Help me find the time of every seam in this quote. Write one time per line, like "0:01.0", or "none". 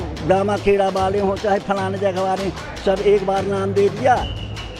none